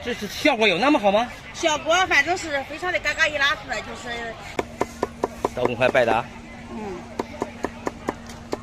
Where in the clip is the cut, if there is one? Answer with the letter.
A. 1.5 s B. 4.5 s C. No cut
B